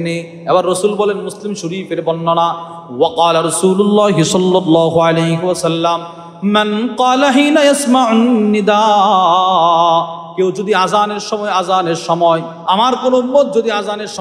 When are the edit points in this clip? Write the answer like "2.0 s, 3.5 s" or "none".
12.5 s